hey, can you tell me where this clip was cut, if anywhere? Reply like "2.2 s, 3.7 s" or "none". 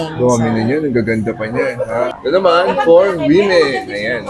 2.2 s